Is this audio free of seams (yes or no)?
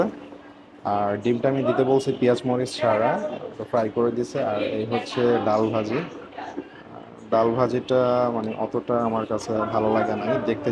yes